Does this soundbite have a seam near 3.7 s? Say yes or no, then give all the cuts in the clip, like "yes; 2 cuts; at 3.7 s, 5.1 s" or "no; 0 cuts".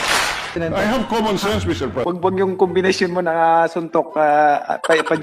no; 1 cut; at 2.0 s